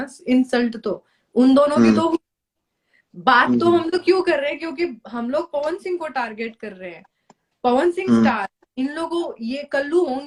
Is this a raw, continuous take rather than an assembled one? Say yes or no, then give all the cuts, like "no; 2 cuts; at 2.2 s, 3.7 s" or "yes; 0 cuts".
yes; 0 cuts